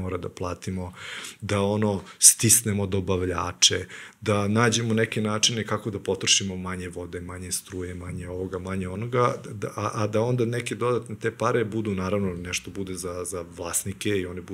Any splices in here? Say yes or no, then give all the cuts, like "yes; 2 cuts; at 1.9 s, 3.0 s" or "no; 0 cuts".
no; 0 cuts